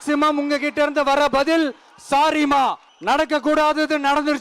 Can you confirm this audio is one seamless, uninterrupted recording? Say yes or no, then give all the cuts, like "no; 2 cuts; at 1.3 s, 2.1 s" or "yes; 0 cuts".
no; 1 cut; at 2.9 s